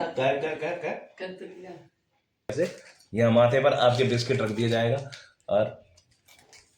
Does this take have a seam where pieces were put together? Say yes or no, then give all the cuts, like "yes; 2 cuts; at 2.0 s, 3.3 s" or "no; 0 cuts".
yes; 1 cut; at 2.5 s